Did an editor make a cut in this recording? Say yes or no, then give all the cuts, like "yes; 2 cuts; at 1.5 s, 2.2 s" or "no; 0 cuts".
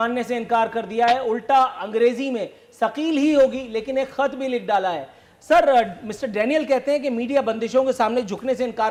no; 0 cuts